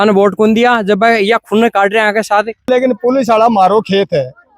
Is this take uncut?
no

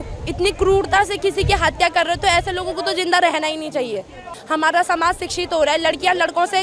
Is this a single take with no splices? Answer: yes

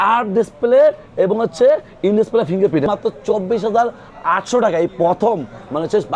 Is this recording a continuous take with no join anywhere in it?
no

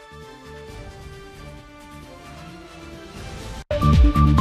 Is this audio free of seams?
yes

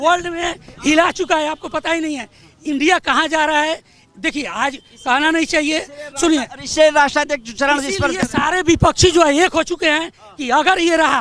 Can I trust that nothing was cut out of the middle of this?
yes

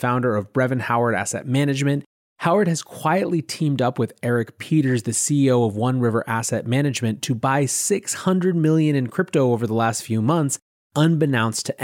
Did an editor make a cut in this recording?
yes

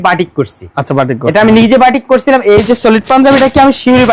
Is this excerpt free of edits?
yes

